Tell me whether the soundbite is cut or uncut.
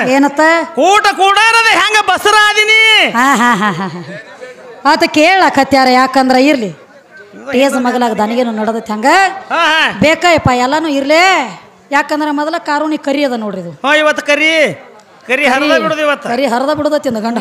uncut